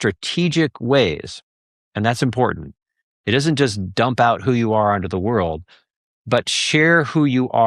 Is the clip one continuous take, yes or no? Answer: yes